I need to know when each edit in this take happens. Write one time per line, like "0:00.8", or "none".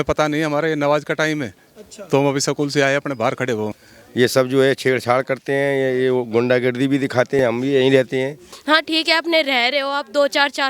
0:03.7
0:07.4
0:08.4